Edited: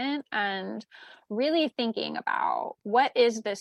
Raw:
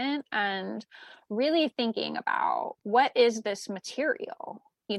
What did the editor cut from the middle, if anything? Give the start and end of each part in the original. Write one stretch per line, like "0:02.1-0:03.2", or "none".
none

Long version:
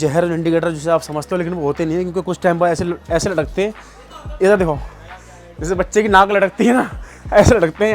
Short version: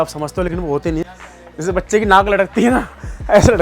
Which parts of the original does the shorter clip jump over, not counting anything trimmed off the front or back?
0:02.0-0:05.1

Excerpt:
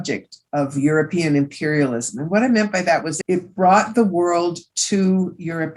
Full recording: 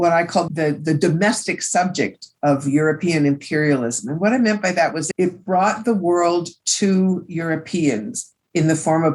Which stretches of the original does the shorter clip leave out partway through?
none

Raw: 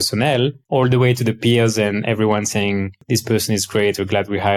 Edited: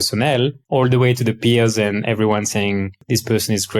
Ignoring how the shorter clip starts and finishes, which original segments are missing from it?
none

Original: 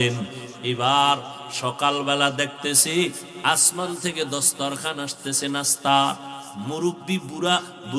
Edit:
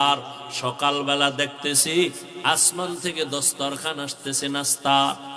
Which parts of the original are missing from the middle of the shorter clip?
none

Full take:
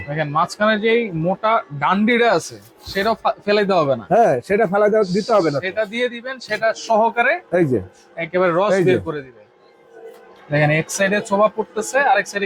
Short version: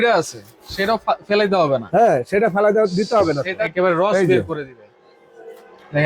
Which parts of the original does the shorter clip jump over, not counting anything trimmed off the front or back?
0:05.9-0:08.3

